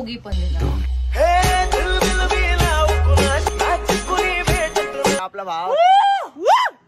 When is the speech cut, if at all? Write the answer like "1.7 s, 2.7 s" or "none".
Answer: 5.2 s